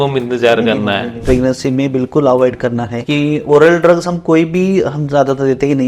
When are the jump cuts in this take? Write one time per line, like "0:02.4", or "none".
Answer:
0:01.2